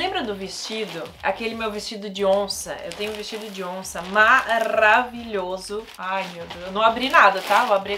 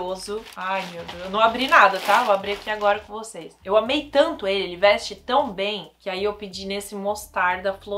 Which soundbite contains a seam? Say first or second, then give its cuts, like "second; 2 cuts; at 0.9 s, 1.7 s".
second; 1 cut; at 3.5 s